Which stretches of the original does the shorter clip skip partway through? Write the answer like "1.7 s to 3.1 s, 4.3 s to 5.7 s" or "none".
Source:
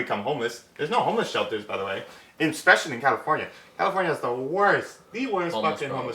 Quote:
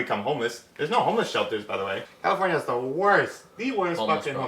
2.1 s to 3.6 s